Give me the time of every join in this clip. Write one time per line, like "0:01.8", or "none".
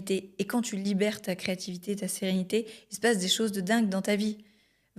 none